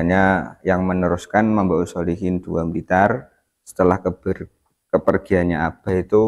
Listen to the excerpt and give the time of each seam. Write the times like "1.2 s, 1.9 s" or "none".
none